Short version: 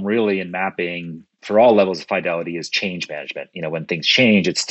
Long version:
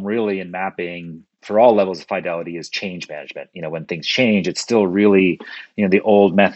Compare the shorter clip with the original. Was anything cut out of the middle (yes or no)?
no